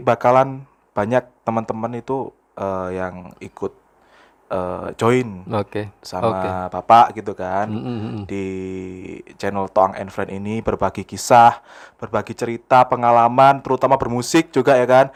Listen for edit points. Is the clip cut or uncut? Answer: uncut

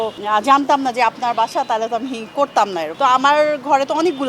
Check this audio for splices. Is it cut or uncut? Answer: cut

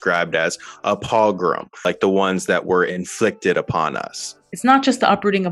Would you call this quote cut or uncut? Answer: cut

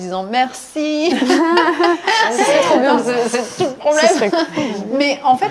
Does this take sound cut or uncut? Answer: uncut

